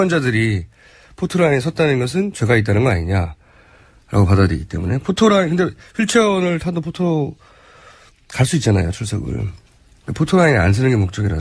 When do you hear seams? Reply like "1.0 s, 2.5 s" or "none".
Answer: none